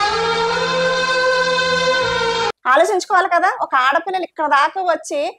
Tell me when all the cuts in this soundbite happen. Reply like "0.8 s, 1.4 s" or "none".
2.5 s